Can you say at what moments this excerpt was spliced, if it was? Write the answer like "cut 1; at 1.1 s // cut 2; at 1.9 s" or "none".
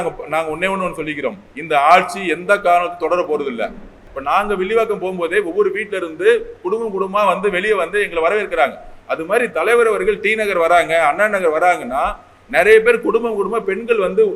cut 1; at 4.0 s